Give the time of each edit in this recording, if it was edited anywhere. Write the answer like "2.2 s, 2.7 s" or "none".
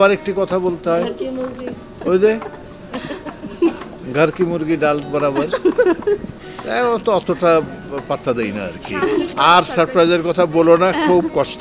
9.3 s

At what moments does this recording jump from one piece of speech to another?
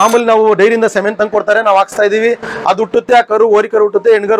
none

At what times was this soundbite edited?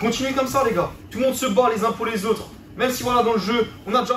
1.0 s

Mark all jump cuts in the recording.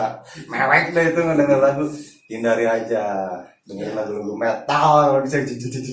none

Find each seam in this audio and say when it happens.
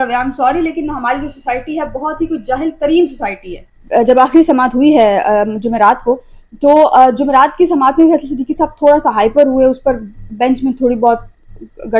3.7 s

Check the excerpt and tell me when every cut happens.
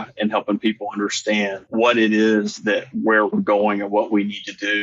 1.6 s

